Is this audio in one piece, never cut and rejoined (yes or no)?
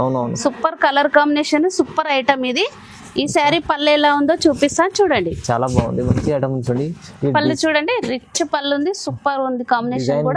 yes